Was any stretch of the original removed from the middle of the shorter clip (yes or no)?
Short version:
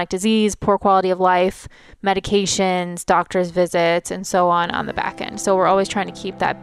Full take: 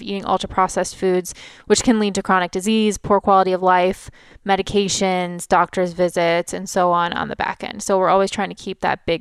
no